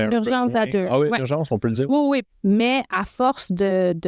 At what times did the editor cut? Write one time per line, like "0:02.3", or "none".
0:02.3